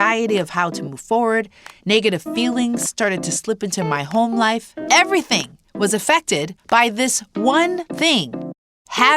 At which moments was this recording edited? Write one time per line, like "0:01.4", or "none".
0:04.7
0:06.6
0:08.2

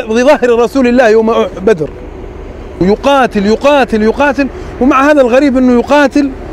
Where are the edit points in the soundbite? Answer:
0:02.8

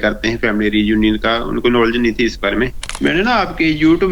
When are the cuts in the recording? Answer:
0:02.8

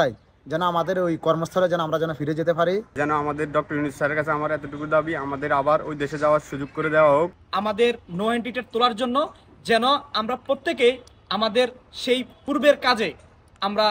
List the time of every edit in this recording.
0:02.9
0:07.4
0:12.3

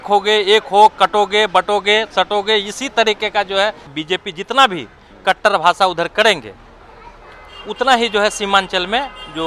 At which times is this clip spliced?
0:03.9

